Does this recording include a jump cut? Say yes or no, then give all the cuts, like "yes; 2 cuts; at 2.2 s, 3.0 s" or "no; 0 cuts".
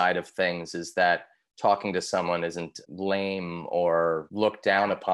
yes; 2 cuts; at 2.7 s, 4.3 s